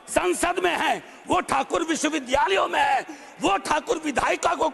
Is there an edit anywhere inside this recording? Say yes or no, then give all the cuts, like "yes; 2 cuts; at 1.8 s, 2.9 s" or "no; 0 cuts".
no; 0 cuts